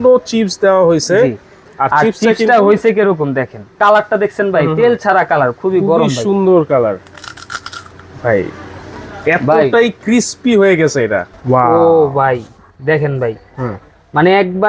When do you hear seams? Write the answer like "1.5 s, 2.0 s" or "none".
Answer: 3.8 s, 11.3 s